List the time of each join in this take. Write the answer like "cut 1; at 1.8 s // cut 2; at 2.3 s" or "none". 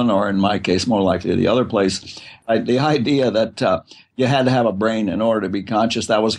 cut 1; at 2.1 s